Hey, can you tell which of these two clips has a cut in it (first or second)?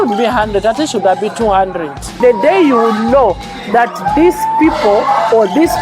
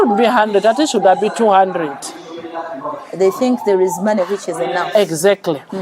first